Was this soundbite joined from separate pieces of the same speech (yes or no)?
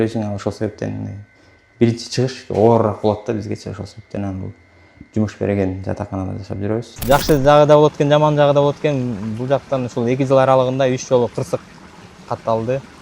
yes